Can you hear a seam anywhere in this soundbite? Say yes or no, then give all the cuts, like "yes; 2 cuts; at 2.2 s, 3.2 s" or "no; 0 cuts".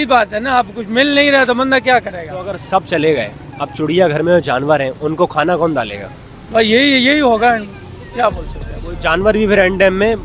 no; 0 cuts